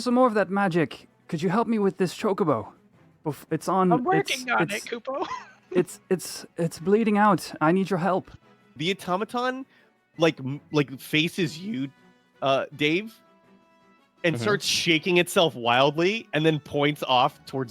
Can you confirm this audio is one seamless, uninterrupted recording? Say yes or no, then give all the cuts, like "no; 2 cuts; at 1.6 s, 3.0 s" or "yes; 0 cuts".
no; 1 cut; at 8.6 s